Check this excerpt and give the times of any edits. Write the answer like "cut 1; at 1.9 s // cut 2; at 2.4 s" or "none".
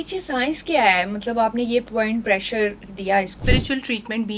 cut 1; at 3.4 s